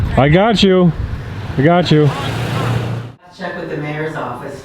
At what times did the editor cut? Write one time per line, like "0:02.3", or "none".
0:03.2